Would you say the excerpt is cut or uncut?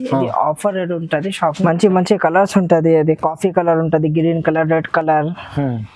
cut